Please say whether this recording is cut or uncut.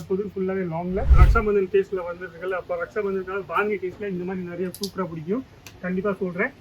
cut